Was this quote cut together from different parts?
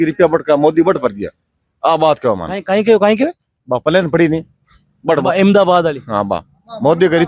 no; 0 cuts

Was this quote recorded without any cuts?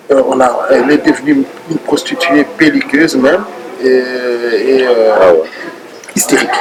yes; 0 cuts

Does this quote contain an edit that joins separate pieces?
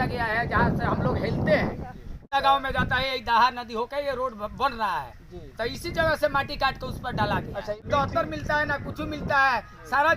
yes; 2 cuts; at 2.3 s, 7.8 s

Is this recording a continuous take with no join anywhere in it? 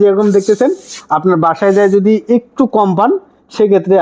yes; 0 cuts

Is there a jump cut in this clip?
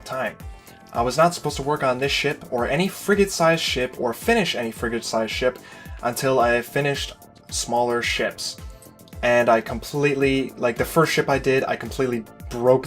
yes; 1 cut; at 11.3 s

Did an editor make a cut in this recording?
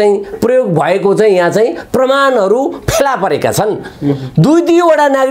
no; 0 cuts

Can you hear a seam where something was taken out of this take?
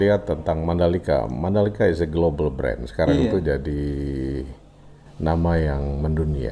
no; 0 cuts

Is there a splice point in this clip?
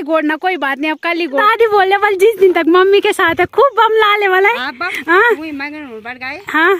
yes; 2 cuts; at 1.4 s, 4.8 s

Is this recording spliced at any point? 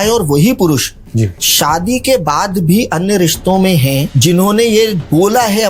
no; 0 cuts

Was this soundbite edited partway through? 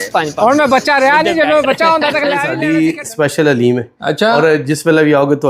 yes; 1 cut; at 2.5 s

